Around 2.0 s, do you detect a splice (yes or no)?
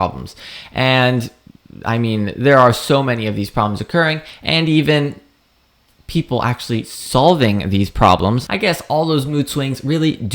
no